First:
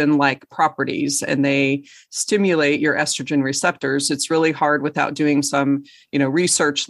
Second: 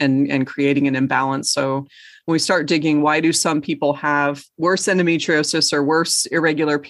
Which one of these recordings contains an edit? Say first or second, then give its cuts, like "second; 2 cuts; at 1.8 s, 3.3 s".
second; 1 cut; at 4.5 s